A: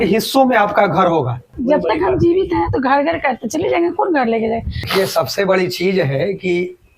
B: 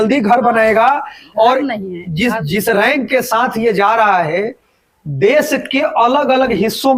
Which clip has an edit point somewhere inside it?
A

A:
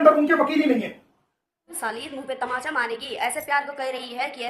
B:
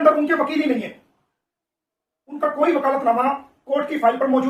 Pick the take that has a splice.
A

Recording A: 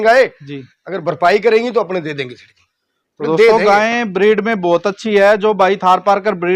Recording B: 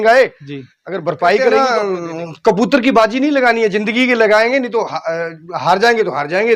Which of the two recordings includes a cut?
B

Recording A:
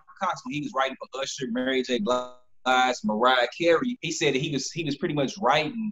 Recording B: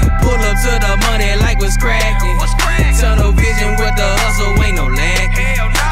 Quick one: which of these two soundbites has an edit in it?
A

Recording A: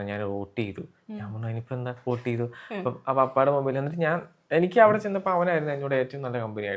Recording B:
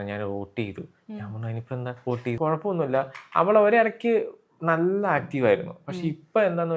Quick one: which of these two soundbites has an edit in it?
B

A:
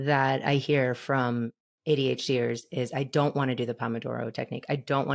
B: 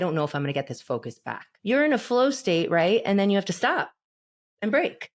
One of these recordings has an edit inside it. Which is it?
B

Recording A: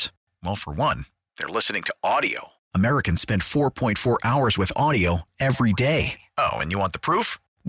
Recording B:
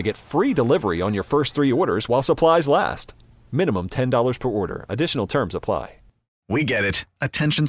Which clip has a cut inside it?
B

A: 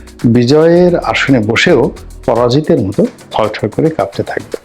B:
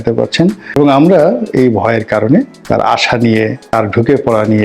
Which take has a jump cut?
B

